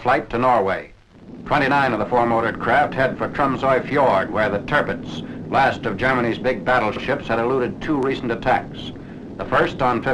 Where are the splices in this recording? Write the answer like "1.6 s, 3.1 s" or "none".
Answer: 0.9 s